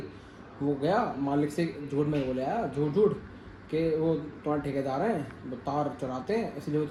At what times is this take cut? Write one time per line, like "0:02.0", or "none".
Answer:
none